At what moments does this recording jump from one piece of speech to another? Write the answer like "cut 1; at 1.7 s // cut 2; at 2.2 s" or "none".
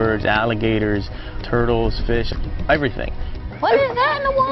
cut 1; at 2.0 s